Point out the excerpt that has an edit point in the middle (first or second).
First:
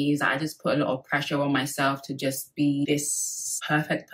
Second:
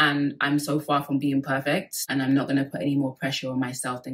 second